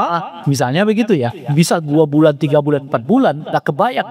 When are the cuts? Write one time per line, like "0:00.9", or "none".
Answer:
none